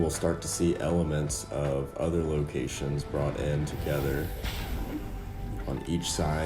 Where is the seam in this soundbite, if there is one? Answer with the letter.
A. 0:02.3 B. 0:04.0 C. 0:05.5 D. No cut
D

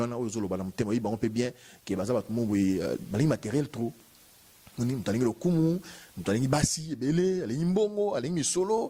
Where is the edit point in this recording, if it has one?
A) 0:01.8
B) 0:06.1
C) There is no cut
C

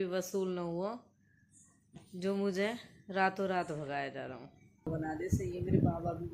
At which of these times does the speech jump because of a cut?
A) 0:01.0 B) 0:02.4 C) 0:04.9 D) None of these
C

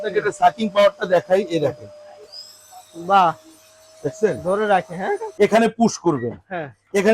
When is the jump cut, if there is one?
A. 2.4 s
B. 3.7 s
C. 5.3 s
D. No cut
C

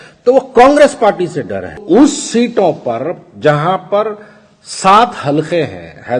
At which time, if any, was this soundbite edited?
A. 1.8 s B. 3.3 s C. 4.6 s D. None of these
A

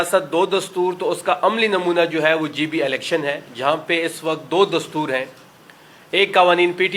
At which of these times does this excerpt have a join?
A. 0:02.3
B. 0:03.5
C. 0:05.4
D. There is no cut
D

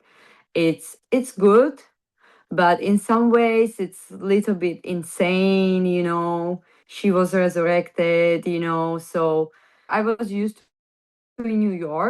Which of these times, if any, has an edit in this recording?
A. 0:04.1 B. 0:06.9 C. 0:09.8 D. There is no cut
C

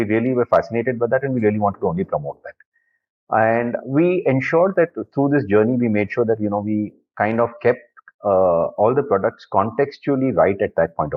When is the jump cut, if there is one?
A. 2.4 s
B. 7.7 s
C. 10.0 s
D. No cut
D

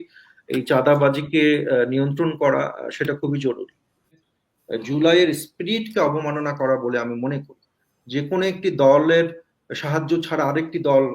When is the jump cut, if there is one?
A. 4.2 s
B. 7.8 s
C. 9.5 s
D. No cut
A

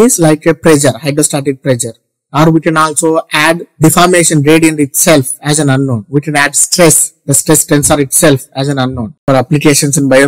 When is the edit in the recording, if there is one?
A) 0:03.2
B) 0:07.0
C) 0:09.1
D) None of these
C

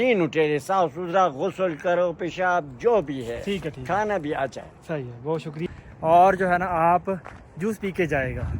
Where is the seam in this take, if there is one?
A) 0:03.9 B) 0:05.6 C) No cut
B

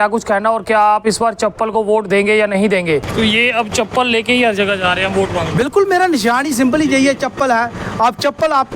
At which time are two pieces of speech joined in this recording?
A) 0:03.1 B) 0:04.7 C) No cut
A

